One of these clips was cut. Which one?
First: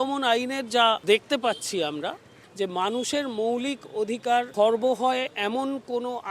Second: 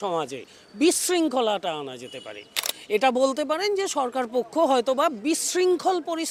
first; 3 cuts; at 1.0 s, 2.3 s, 4.5 s

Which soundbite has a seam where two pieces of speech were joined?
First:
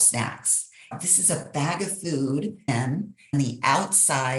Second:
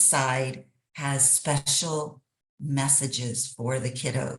first; 2 cuts; at 1.0 s, 2.8 s

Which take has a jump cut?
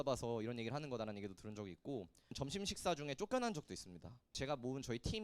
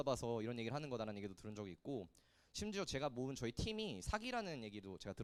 first; 2 cuts; at 2.3 s, 4.3 s

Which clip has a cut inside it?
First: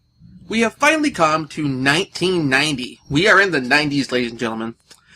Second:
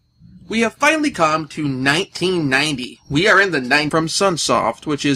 first; 1 cut; at 3.9 s

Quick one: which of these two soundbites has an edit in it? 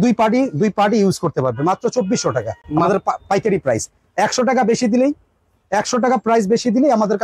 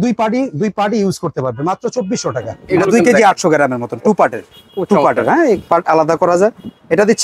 second; 1 cut; at 2.5 s

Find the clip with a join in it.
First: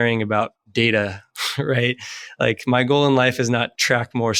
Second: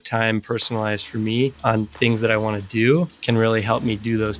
second; 2 cuts; at 1.6 s, 3.2 s

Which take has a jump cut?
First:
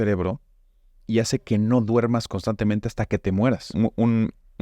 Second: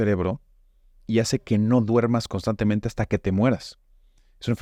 first; 1 cut; at 3.7 s

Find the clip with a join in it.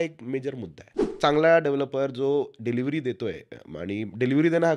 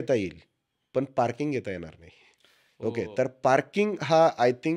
first; 1 cut; at 1.0 s

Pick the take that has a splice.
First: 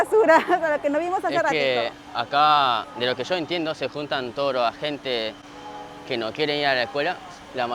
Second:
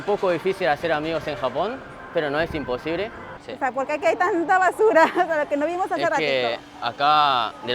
second; 1 cut; at 3.4 s

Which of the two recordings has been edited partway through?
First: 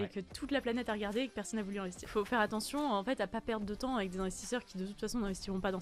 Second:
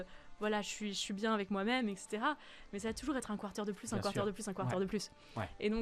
first; 1 cut; at 2.1 s

